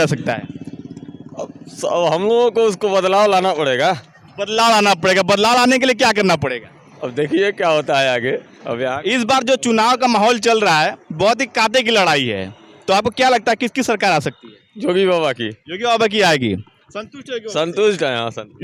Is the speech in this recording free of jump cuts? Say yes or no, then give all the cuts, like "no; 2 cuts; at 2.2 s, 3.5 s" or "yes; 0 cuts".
yes; 0 cuts